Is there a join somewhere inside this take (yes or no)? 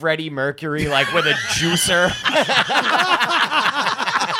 no